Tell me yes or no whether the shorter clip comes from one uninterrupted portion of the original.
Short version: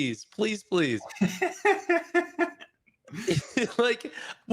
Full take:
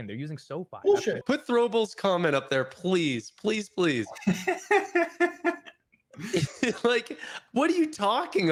yes